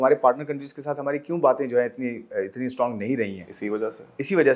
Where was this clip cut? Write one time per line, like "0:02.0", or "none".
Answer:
none